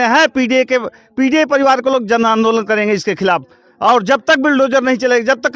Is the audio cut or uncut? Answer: uncut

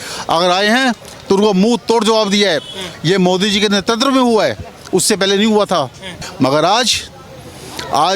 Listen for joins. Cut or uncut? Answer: cut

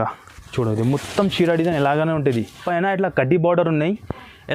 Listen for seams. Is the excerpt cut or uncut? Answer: cut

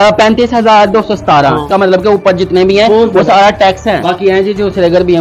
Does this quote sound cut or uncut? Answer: cut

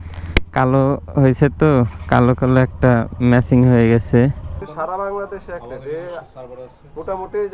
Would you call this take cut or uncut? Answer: cut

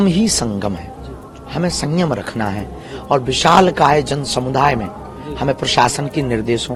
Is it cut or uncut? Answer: uncut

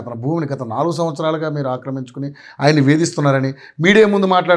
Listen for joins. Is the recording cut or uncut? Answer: uncut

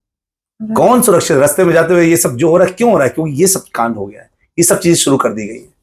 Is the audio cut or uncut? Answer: uncut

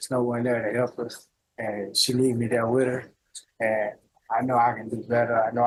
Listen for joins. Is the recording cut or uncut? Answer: uncut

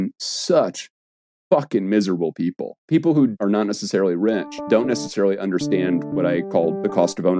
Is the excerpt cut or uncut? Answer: cut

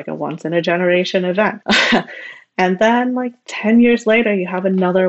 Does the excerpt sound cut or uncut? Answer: cut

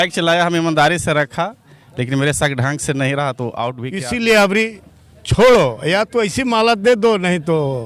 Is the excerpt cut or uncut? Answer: cut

